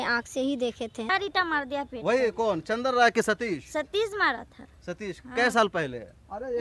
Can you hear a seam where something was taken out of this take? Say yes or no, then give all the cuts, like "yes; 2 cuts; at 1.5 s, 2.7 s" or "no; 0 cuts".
yes; 1 cut; at 1.1 s